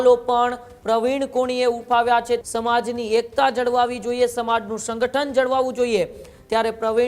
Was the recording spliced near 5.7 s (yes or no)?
no